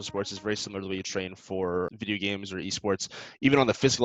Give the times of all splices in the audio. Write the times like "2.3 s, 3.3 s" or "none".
1.9 s